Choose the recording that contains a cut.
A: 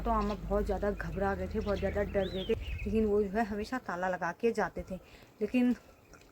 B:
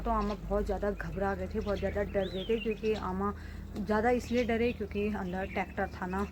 A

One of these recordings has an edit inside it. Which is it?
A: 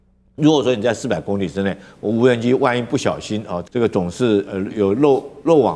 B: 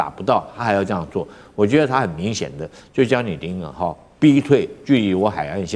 A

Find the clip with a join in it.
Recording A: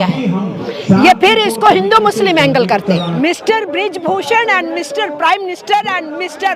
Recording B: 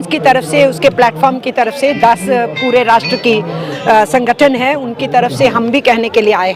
A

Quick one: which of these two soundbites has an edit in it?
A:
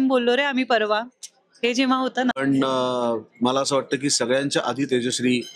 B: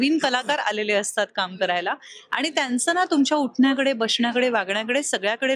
A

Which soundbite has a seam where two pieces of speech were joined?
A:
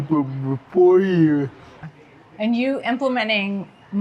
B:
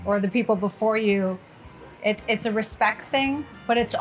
A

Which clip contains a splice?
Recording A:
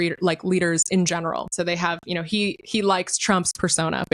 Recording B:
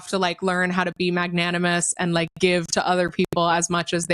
A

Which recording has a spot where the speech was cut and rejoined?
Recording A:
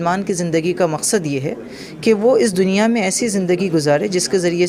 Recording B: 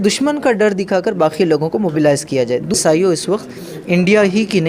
B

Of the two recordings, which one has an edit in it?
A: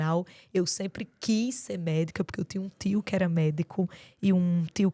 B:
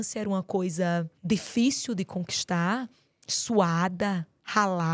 B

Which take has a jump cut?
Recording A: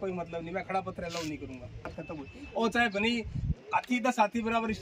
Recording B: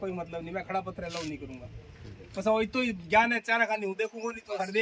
A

